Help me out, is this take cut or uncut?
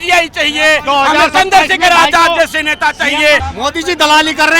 cut